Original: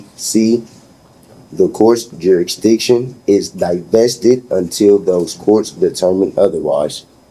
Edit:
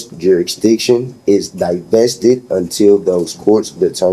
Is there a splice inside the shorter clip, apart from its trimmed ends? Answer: no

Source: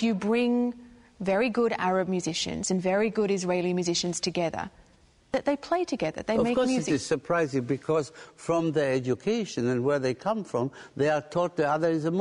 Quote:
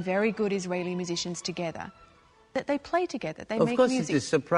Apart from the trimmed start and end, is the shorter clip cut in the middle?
no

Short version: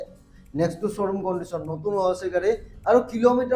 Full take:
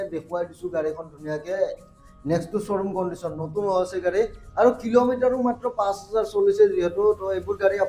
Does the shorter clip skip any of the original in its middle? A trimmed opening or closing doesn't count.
no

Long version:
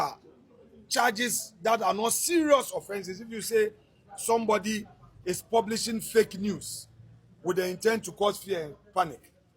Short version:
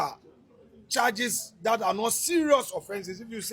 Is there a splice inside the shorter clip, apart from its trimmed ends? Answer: no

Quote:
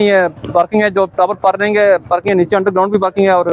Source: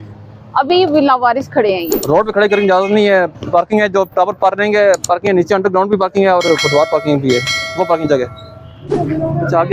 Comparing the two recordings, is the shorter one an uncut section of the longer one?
yes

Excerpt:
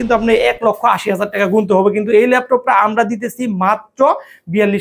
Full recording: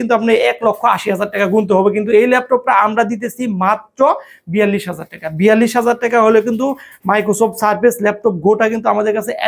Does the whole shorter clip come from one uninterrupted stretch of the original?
yes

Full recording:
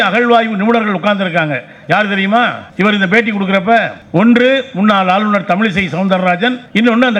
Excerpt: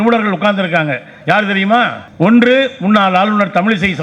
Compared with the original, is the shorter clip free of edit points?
no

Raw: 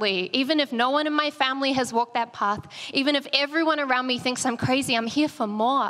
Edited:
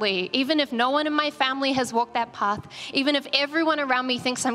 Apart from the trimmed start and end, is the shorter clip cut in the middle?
no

